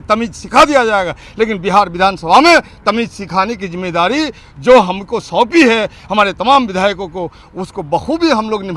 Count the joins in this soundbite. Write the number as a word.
zero